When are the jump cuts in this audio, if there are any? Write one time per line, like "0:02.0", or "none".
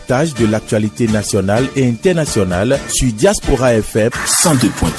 none